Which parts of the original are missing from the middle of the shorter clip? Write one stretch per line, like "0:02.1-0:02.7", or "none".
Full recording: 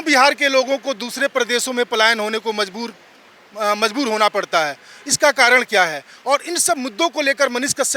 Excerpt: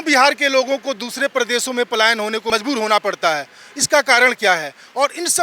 0:02.5-0:03.8